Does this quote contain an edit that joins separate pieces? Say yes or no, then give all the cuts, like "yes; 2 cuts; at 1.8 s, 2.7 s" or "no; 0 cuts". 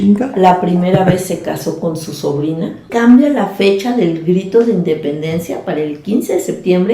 yes; 1 cut; at 2.9 s